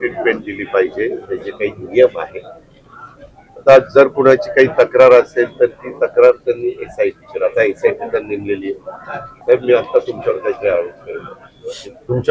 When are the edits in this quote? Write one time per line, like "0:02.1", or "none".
0:09.3